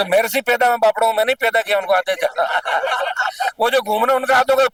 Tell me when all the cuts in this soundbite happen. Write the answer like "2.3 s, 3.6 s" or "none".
none